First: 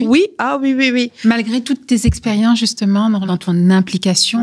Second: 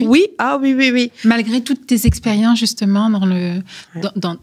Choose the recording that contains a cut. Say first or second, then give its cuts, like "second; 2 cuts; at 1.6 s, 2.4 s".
first; 1 cut; at 3.2 s